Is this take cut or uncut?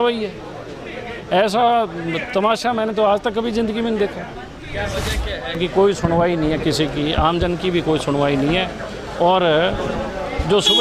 cut